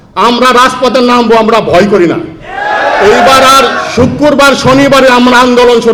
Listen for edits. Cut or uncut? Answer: uncut